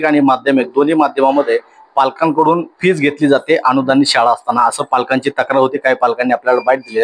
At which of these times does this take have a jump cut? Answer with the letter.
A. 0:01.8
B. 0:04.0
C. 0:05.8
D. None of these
D